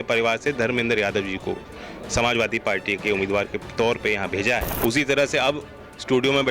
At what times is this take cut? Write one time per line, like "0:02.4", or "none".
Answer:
0:04.7